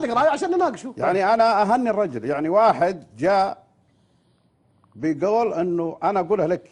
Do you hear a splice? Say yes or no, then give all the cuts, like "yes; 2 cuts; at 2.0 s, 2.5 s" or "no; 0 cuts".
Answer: no; 0 cuts